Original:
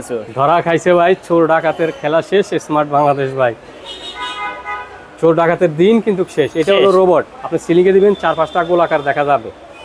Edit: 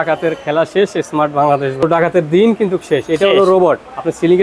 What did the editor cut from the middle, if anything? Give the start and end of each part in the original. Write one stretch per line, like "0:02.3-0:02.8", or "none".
0:03.4-0:05.3